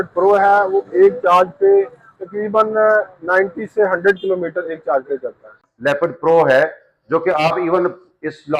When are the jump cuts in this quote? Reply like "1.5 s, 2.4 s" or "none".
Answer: 5.6 s